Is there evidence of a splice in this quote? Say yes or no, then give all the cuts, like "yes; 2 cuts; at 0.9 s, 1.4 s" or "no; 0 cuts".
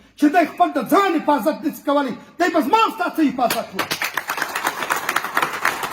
no; 0 cuts